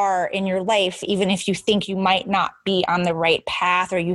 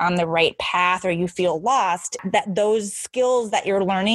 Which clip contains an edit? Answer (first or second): second